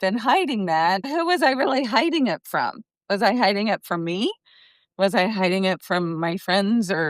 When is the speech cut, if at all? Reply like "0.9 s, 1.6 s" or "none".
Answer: 1.1 s

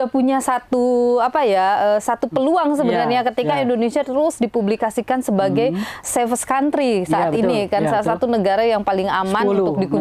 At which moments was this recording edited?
none

